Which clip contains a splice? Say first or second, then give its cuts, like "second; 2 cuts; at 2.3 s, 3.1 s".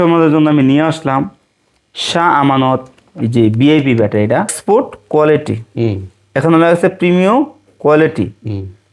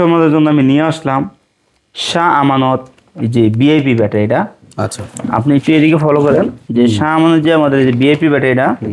first; 1 cut; at 4.6 s